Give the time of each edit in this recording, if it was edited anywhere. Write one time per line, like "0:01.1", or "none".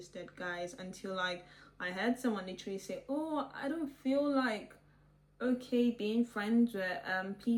none